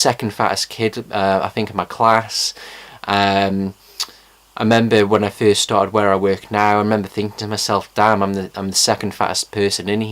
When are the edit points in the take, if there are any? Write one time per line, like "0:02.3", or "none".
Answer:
0:08.7